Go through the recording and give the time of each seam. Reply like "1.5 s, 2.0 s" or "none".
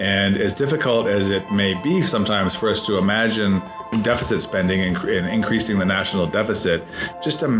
3.9 s

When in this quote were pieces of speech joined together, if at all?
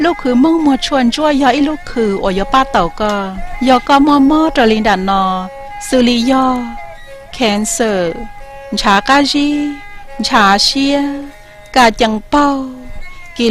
6.2 s

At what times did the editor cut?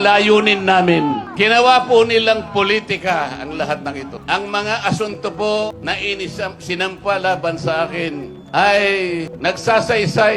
1.3 s, 4.1 s, 5.8 s, 8.3 s, 9.3 s

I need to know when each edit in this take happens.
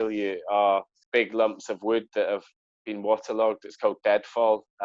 1.0 s

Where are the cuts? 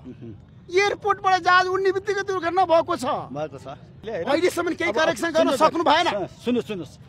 4.0 s

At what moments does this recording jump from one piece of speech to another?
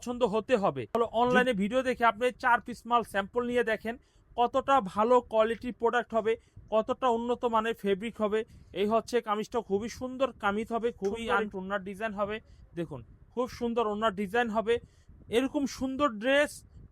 1.0 s, 11.2 s

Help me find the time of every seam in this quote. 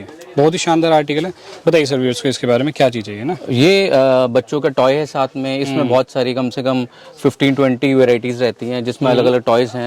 none

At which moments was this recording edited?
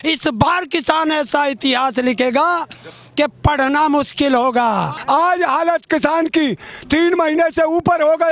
4.9 s

